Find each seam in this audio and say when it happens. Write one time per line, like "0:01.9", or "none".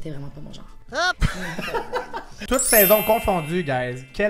none